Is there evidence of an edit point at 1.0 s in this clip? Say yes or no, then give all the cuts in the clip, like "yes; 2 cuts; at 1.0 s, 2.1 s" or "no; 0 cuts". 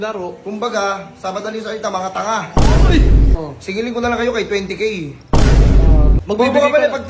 no; 2 cuts; at 3.3 s, 6.2 s